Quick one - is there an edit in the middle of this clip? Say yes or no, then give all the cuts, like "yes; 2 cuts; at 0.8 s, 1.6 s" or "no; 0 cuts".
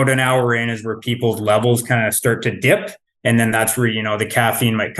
no; 0 cuts